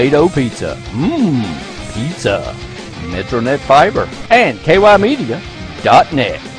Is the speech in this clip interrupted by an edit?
yes; 1 cut; at 4.2 s

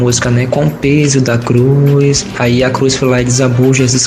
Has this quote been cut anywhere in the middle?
no; 0 cuts

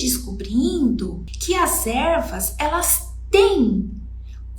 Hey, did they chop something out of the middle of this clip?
yes; 1 cut; at 1.3 s

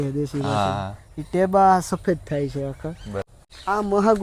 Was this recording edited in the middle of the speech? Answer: yes; 1 cut; at 3.2 s

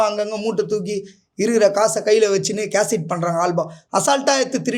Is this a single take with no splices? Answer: yes; 0 cuts

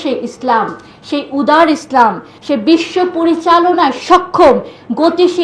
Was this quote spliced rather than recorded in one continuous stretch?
yes; 1 cut; at 2.3 s

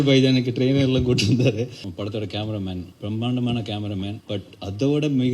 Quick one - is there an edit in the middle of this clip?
yes; 3 cuts; at 1.8 s, 2.9 s, 4.2 s

